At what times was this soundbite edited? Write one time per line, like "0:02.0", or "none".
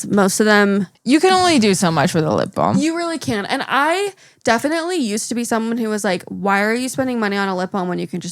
0:00.9